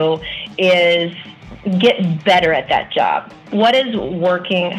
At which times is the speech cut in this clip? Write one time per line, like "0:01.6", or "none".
0:03.5